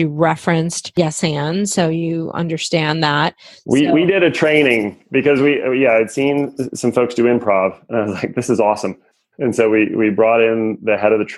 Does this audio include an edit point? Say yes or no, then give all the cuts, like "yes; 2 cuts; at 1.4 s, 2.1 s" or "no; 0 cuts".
no; 0 cuts